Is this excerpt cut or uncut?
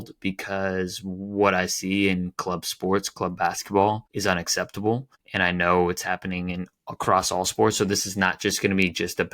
cut